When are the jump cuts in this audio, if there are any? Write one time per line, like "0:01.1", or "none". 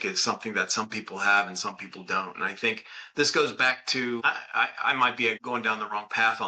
0:04.2
0:05.4

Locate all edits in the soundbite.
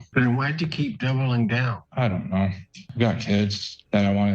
0:01.7
0:02.8

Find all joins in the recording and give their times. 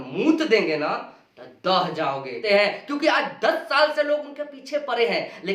0:02.4

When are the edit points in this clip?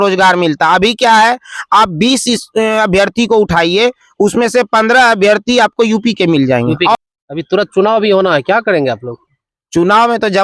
0:07.0

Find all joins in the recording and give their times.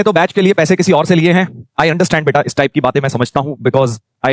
none

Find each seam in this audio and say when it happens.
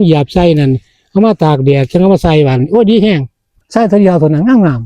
0:03.6

